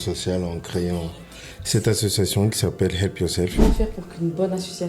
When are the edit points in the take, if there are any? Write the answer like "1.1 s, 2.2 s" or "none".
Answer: 3.6 s